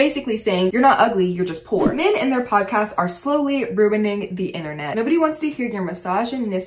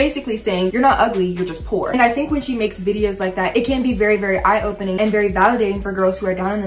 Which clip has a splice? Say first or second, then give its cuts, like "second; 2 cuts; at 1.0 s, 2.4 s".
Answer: first; 2 cuts; at 1.8 s, 4.9 s